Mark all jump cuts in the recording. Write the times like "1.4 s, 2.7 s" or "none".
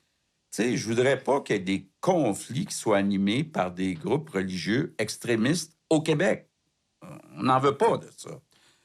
none